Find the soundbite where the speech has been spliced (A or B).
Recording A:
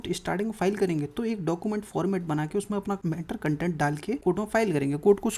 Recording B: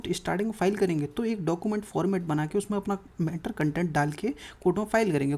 A